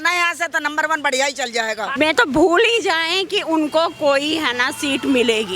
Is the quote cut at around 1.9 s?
yes; 1 cut; at 1.9 s

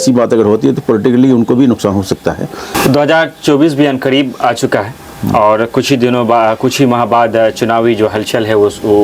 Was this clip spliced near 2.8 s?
yes; 1 cut; at 2.8 s

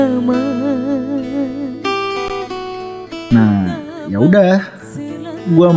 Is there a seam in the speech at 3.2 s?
yes; 1 cut; at 3.2 s

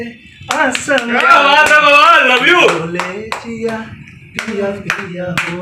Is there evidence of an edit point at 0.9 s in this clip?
no; 0 cuts

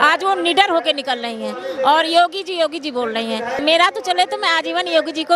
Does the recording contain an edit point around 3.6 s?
yes; 1 cut; at 3.6 s

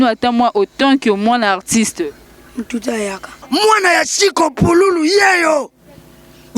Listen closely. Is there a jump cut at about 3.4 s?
yes; 1 cut; at 3.4 s

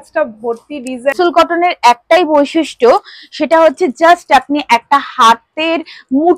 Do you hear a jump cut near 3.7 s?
no; 1 cut; at 1.1 s

